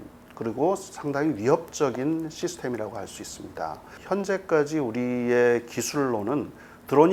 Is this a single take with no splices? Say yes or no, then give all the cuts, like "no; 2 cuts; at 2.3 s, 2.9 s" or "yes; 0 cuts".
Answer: yes; 0 cuts